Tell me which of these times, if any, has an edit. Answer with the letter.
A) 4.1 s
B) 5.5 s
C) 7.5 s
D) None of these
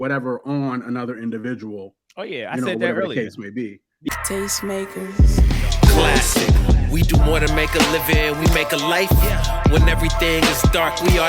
A